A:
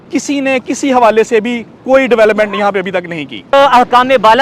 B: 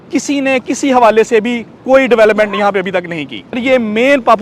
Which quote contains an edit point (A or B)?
A